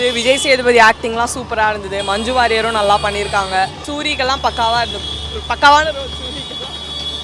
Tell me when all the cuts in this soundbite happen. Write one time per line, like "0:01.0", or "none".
0:03.8